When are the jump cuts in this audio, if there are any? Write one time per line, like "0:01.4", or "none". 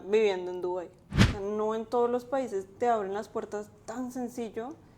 0:01.3